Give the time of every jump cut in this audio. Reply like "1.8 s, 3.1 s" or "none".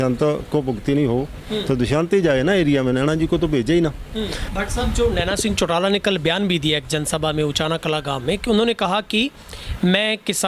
4.4 s